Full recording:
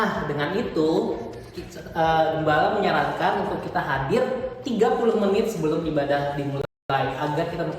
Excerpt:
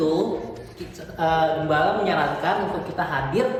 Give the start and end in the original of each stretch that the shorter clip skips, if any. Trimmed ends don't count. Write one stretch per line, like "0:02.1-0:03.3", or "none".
none

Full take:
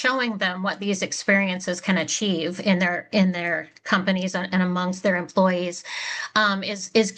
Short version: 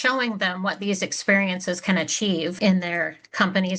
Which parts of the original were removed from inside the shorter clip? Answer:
0:02.5-0:03.1

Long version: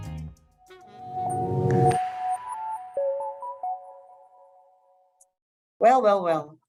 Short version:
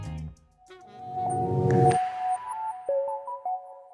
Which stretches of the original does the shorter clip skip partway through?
0:02.9-0:03.1

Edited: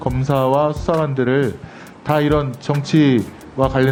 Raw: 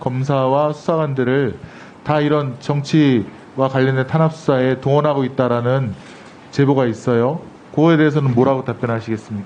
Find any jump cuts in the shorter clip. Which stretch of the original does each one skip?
none

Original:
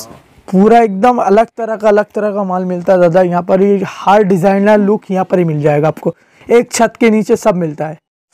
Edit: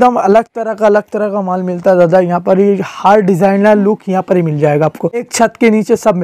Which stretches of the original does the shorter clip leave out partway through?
0:06.3-0:06.7

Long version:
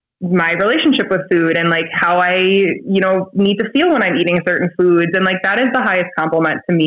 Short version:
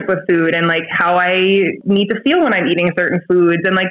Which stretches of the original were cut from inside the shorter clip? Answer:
0:02.8-0:03.3

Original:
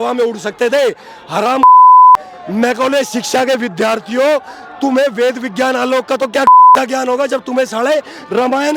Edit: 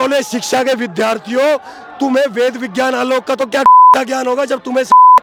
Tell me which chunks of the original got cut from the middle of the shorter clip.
none

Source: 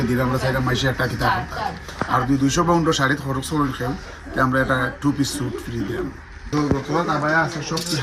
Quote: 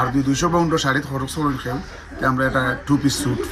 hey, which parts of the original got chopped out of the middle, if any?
none

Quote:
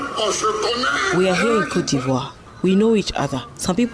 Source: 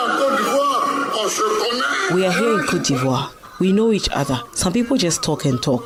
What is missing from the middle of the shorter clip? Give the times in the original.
none

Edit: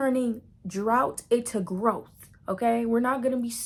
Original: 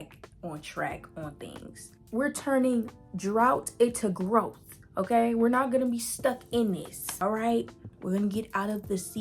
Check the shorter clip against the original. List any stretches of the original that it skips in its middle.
none

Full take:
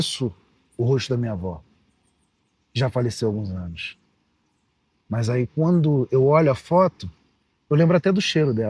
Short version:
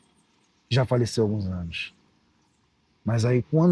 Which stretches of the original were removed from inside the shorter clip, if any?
none

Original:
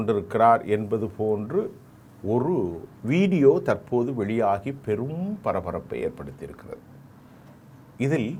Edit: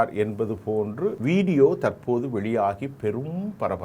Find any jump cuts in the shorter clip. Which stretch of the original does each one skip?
0:01.7-0:03.0

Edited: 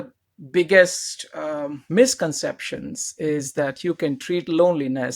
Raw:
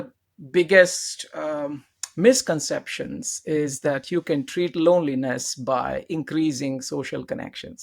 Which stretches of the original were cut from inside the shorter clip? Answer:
0:01.7-0:02.0

